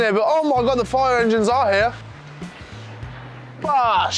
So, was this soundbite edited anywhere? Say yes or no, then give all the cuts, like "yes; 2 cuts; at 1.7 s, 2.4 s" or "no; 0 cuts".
no; 0 cuts